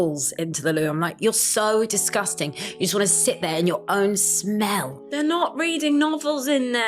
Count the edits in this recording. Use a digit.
0